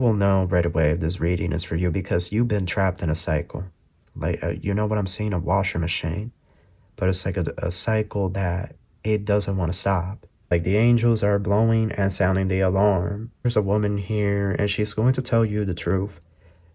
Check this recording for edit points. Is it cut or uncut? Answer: cut